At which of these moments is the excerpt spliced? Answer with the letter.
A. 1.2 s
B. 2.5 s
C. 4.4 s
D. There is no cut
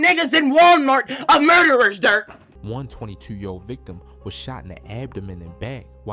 B